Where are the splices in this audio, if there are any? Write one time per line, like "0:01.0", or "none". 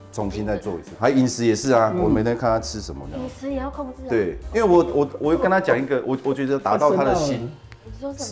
0:00.9
0:04.5